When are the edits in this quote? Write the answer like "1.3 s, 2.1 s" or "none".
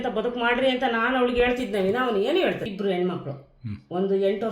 2.7 s